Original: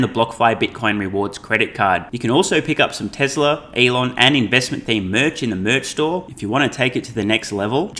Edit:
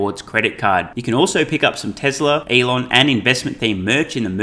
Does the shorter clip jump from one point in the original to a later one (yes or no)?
yes